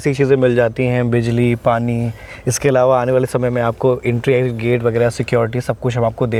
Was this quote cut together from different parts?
no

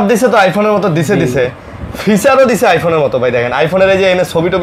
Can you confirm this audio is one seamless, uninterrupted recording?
yes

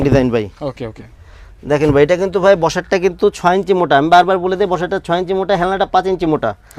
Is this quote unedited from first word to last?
yes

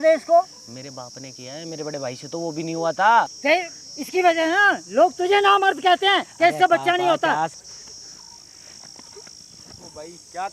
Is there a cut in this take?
yes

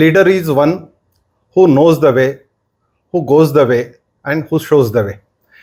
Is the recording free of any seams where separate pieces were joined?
yes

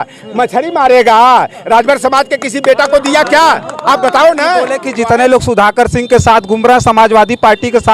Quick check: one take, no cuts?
no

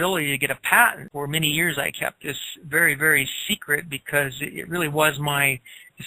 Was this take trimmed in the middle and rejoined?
yes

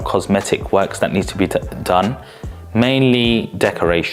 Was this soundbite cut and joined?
no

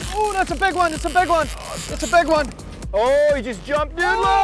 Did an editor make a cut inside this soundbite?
no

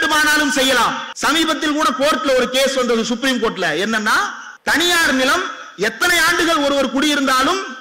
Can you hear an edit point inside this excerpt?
yes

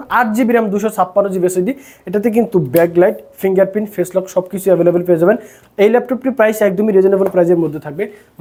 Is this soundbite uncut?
yes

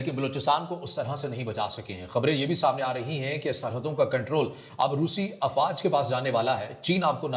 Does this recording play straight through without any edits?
yes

